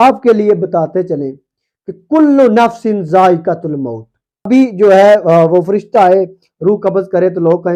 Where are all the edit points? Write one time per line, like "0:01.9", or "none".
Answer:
0:04.5